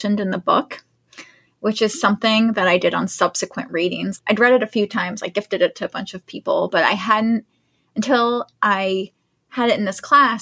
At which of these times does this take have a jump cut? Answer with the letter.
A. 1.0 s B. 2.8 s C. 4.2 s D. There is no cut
C